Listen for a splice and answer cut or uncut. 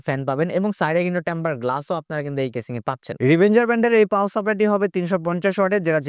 cut